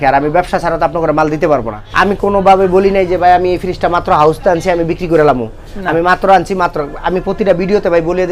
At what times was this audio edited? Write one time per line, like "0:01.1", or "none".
0:01.8